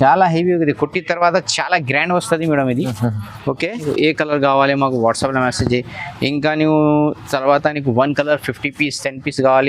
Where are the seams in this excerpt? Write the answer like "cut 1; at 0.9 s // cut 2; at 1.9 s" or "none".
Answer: cut 1; at 3.8 s